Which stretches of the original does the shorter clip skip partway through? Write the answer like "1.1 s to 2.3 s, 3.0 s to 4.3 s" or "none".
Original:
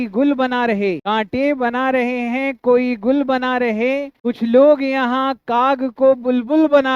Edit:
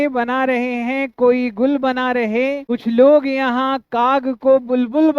4.1 s to 4.2 s